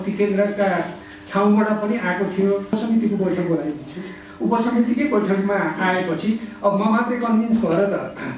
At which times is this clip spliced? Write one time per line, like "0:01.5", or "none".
0:02.7